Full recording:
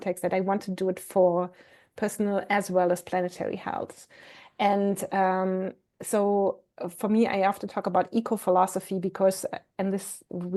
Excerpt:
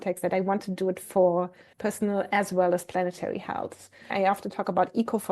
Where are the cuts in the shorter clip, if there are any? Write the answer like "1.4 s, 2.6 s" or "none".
1.6 s, 4.1 s

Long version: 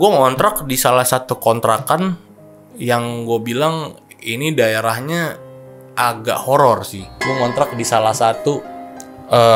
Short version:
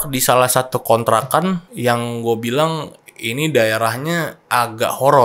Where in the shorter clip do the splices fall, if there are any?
1.7 s, 4.4 s

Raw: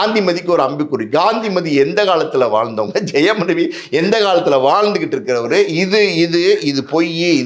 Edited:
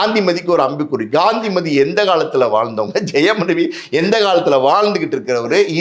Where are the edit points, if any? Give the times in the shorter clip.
none

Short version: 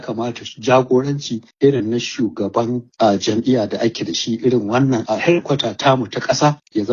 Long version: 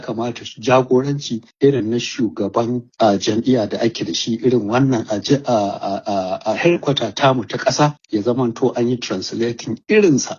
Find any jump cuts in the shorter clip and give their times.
5.0 s

